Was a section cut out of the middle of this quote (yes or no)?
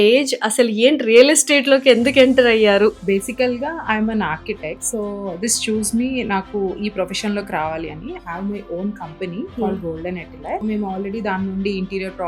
yes